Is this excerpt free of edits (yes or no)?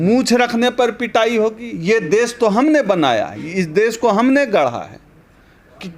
yes